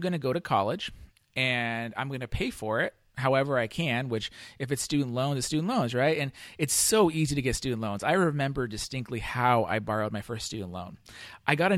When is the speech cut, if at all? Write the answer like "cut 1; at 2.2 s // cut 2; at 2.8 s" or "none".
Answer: none